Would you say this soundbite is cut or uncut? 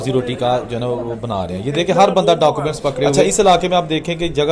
cut